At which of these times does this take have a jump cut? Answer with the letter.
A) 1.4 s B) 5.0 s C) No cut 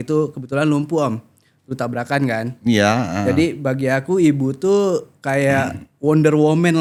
C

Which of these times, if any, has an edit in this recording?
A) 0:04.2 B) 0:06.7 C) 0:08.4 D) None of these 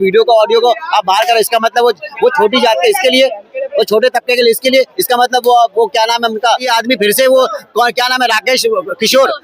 B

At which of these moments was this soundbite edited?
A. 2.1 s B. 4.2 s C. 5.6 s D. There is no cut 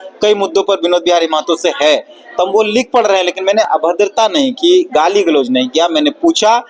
D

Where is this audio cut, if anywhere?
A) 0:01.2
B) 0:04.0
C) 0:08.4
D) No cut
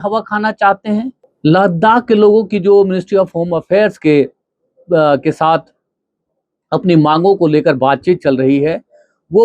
A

